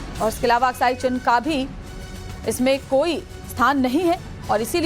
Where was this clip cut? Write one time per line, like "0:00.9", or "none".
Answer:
0:02.8